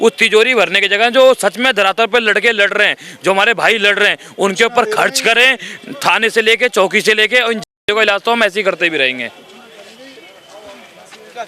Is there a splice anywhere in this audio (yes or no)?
no